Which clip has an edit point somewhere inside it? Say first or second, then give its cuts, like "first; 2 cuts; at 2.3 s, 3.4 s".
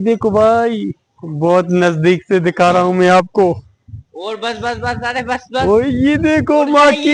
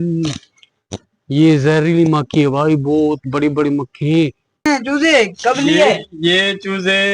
second; 1 cut; at 4.7 s